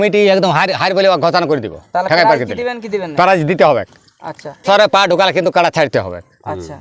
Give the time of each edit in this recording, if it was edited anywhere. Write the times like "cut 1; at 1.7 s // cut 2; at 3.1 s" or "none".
cut 1; at 4.6 s